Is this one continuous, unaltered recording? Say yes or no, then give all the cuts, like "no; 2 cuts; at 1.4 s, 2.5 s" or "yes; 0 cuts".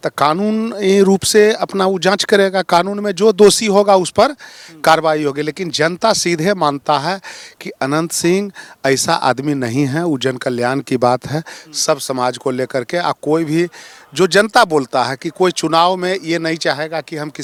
yes; 0 cuts